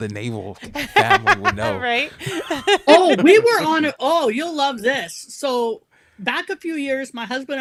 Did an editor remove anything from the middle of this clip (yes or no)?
no